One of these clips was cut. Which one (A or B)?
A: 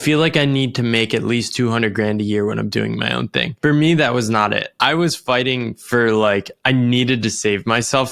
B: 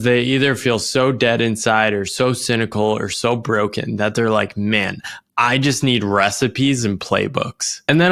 A